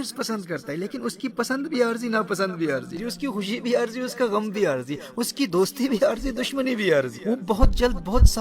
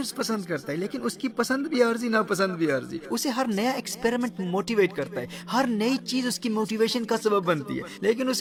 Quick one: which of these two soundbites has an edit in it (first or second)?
first